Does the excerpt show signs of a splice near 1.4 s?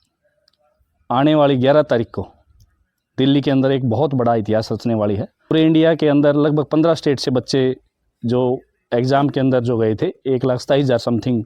no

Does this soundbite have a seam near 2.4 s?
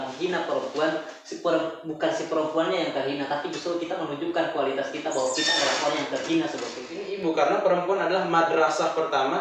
no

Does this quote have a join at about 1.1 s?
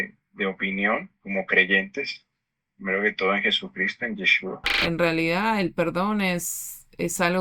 yes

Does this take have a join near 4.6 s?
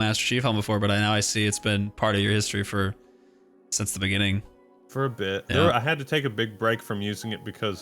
no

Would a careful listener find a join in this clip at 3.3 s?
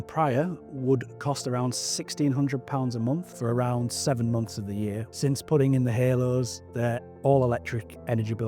yes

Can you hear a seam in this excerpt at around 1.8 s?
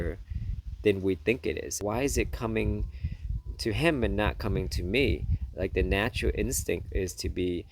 yes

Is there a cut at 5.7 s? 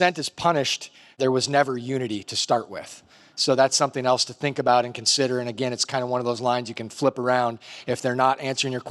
no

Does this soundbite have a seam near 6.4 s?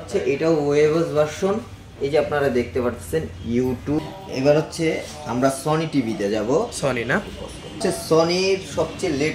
no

